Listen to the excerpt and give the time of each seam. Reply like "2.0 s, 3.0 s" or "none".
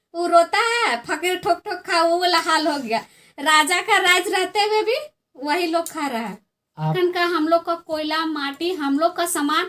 6.9 s